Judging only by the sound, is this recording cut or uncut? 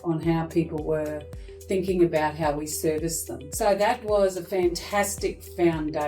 cut